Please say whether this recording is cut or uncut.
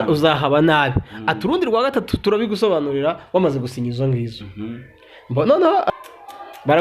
cut